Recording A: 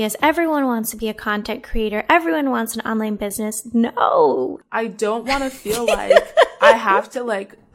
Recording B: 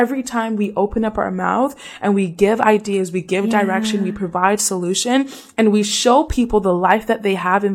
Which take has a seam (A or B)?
A